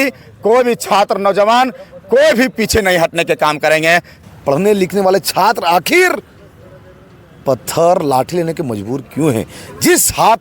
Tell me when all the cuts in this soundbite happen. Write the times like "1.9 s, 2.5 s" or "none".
4.1 s